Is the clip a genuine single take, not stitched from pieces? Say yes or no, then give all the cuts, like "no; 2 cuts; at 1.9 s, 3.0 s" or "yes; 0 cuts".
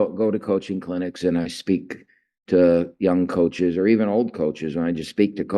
yes; 0 cuts